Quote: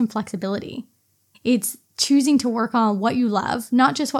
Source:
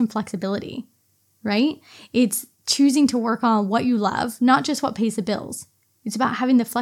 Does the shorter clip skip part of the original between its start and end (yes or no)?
yes